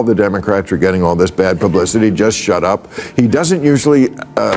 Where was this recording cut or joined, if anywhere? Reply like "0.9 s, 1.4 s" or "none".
none